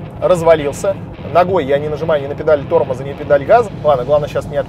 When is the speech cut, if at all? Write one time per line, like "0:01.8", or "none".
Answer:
0:01.1
0:03.7